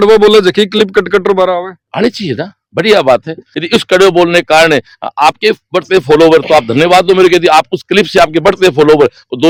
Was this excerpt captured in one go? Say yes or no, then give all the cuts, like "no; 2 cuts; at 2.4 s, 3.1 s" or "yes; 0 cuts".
yes; 0 cuts